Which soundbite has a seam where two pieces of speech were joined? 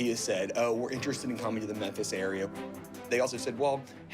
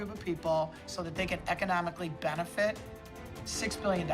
first; 1 cut; at 3.0 s

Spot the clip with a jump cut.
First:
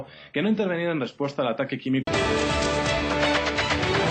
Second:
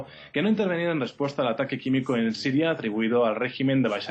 second; 1 cut; at 2.1 s

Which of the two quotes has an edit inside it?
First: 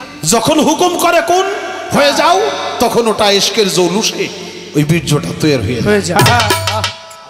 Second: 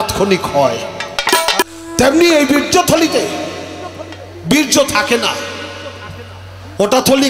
second; 1 cut; at 1.6 s

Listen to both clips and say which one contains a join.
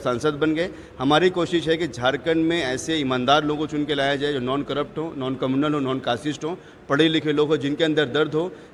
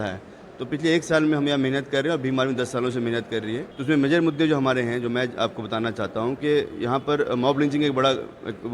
second; 1 cut; at 3.7 s

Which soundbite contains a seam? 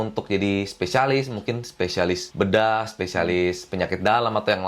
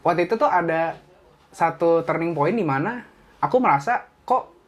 first; 1 cut; at 2.3 s

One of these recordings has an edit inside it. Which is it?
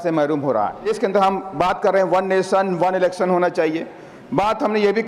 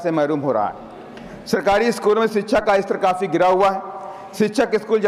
first; 1 cut; at 0.9 s

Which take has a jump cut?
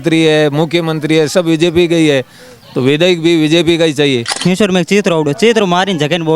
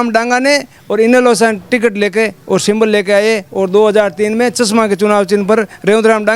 first; 1 cut; at 4.4 s

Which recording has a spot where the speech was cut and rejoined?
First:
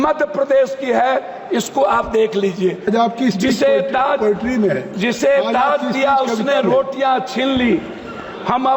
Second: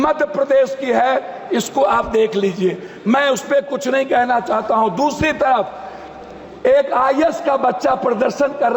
first; 1 cut; at 2.9 s

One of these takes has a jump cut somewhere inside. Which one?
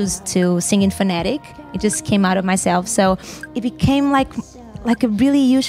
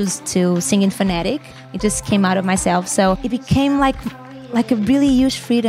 second; 1 cut; at 3.2 s

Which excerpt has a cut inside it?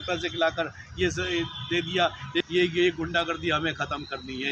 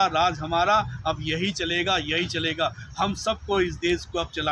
first; 1 cut; at 2.4 s

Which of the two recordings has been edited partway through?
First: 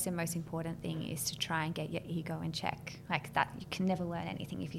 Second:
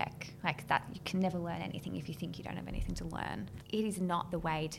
second; 1 cut; at 3.5 s

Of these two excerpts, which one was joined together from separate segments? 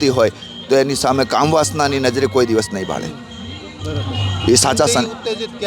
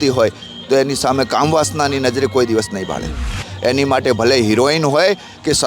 second; 1 cut; at 3.5 s

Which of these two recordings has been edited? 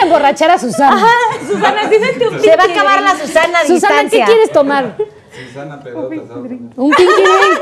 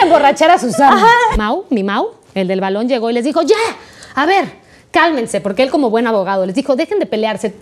second; 1 cut; at 1.4 s

